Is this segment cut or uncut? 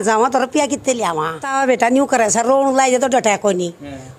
cut